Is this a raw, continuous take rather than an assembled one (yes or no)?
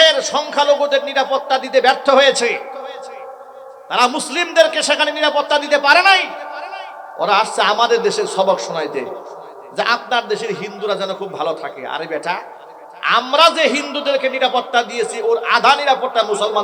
yes